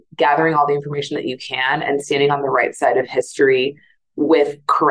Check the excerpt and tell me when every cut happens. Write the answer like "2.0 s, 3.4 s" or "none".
none